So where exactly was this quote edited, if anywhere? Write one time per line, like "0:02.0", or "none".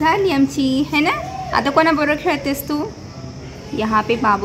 none